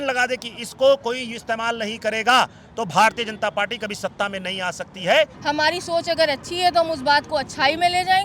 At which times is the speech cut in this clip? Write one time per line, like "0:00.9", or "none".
0:05.4